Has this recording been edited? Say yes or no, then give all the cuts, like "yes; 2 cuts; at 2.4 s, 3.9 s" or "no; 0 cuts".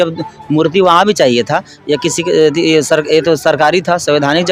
no; 0 cuts